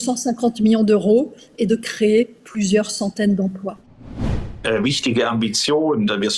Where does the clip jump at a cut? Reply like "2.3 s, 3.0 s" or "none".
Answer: 4.2 s